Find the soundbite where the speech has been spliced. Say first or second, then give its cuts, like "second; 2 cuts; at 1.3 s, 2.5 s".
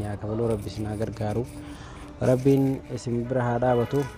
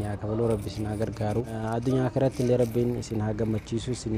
second; 1 cut; at 1.6 s